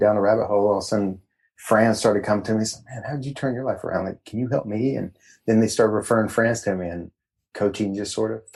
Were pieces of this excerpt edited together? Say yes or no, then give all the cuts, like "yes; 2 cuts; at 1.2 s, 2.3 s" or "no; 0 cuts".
no; 0 cuts